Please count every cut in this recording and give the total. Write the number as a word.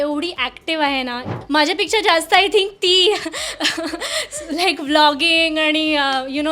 one